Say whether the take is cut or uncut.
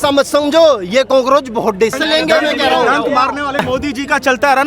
cut